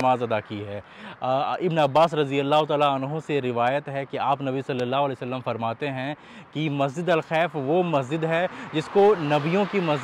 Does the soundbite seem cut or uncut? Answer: uncut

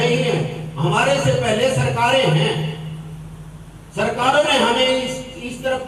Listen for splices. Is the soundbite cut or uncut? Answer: uncut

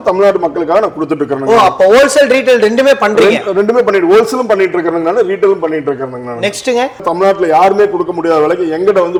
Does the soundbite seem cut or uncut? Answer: uncut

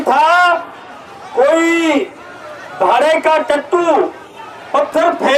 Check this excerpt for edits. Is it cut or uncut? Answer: uncut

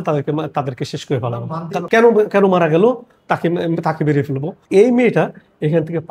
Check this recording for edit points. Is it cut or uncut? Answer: cut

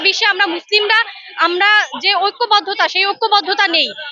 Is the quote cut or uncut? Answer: uncut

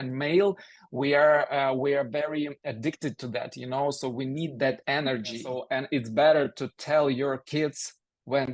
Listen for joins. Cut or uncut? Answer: cut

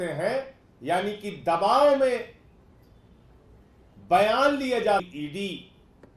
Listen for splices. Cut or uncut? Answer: cut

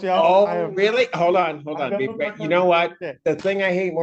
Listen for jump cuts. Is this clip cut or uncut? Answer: uncut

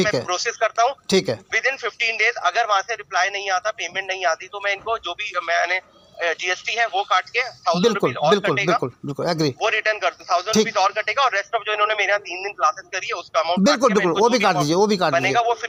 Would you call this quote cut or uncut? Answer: uncut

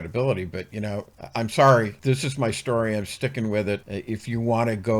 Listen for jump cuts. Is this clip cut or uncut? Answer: cut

